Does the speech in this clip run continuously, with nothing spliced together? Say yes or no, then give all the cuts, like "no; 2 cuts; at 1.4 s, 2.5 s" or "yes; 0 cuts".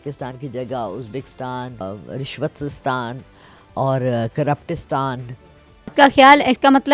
no; 2 cuts; at 1.8 s, 5.9 s